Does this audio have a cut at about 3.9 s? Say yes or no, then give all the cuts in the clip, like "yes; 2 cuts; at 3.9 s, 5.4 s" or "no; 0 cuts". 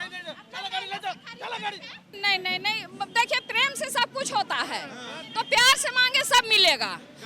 no; 1 cut; at 2.1 s